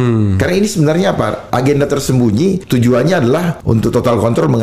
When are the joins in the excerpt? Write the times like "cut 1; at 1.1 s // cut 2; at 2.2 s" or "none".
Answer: cut 1; at 1.4 s // cut 2; at 2.6 s // cut 3; at 3.6 s